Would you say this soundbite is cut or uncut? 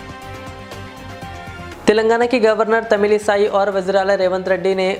uncut